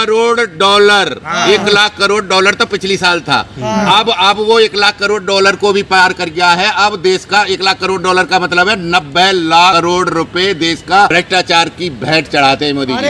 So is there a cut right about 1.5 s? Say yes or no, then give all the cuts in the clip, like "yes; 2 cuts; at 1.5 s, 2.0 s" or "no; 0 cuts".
no; 2 cuts; at 9.7 s, 11.1 s